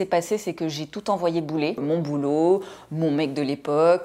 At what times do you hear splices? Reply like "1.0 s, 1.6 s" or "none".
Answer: 1.8 s